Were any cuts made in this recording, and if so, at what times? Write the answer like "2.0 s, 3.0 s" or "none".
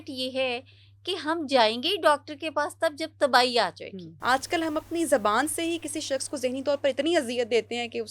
4.1 s